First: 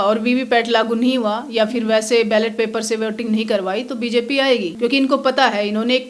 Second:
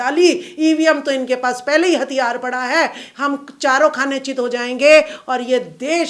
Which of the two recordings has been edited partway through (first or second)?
first